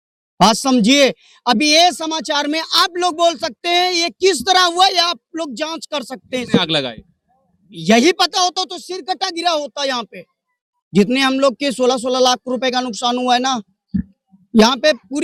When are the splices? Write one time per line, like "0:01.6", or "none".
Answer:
none

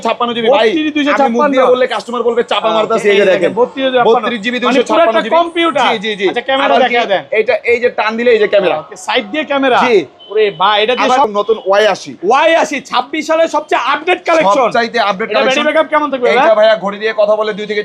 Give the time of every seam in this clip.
0:11.3

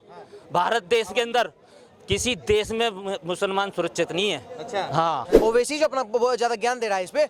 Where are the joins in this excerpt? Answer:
0:05.3

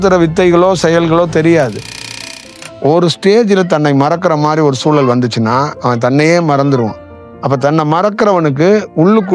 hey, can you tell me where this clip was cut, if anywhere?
0:02.3

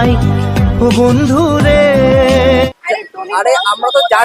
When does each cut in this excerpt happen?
0:02.7

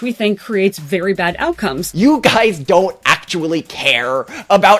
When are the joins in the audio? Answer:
0:01.8

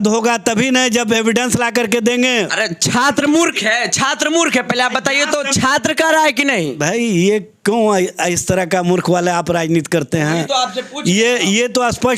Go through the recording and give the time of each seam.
none

